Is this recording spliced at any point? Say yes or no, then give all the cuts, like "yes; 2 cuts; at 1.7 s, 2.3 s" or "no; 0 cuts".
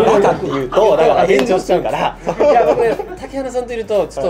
no; 0 cuts